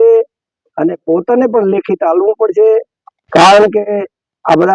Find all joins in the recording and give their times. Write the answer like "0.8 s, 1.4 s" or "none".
none